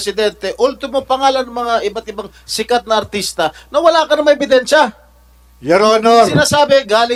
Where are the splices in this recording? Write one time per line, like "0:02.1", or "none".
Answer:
none